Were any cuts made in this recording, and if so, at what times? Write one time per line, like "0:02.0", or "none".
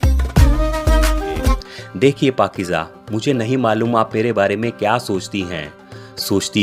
0:01.4